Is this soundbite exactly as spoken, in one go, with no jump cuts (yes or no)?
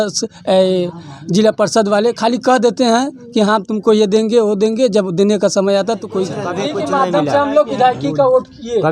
no